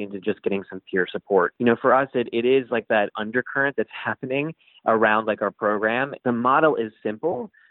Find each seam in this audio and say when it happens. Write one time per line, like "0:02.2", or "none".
0:01.5
0:03.1
0:06.1